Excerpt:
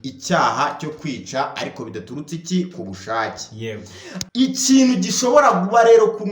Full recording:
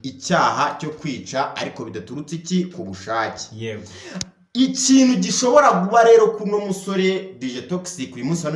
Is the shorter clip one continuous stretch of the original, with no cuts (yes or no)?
no